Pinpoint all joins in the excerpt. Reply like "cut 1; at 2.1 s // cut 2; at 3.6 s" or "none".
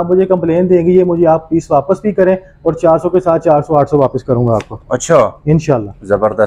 none